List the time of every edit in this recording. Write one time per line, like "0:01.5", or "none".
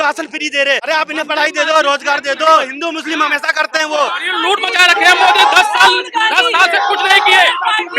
0:00.8
0:02.7
0:04.3